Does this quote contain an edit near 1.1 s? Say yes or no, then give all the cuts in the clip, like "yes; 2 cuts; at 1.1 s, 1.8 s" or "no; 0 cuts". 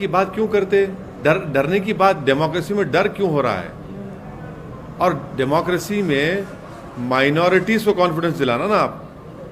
yes; 1 cut; at 1.1 s